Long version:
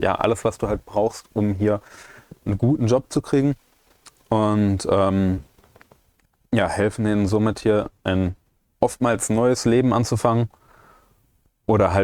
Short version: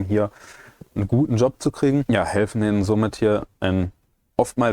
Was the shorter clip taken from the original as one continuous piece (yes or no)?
no